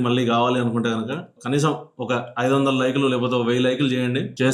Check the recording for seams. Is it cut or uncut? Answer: uncut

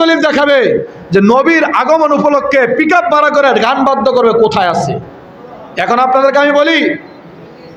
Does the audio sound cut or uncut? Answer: uncut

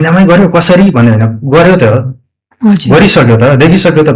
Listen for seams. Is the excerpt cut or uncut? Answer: uncut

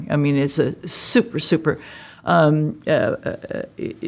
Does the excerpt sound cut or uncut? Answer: uncut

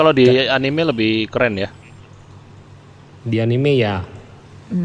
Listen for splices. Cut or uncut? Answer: uncut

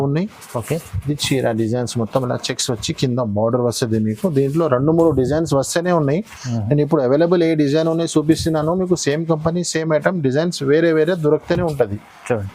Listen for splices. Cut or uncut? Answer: uncut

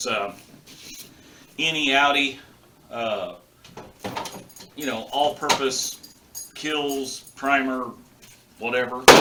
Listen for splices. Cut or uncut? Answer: uncut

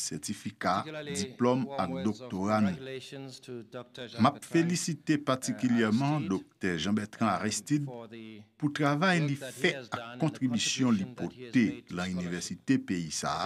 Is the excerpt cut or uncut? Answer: uncut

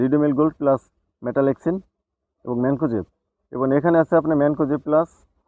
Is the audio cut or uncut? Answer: uncut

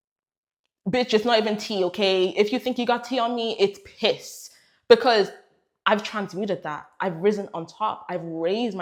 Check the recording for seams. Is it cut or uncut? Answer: uncut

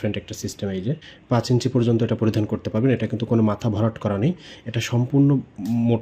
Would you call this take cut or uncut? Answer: cut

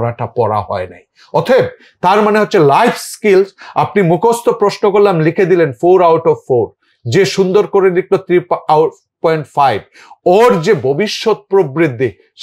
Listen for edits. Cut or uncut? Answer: uncut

